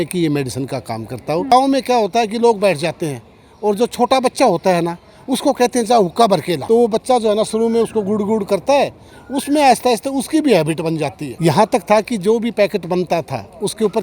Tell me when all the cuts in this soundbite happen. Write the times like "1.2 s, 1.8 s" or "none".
1.5 s, 6.6 s, 11.2 s